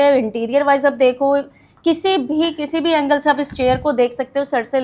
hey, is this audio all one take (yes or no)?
yes